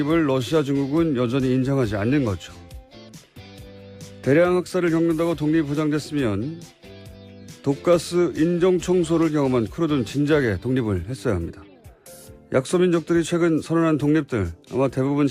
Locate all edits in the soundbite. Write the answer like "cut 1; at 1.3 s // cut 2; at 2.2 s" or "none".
cut 1; at 12.5 s